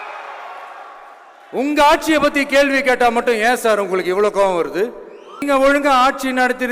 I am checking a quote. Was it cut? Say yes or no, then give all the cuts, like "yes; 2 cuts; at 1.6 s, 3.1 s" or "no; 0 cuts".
yes; 1 cut; at 5.4 s